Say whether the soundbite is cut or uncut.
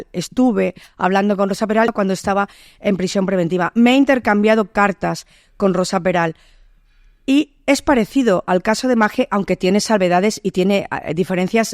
cut